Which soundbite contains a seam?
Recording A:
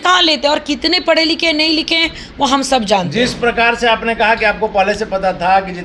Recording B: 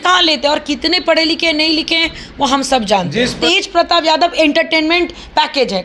B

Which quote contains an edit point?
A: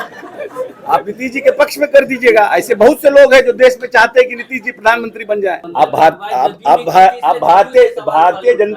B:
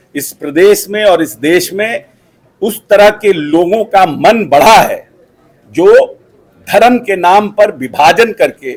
A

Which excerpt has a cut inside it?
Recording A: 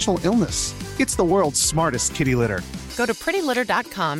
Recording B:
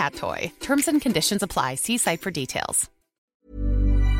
B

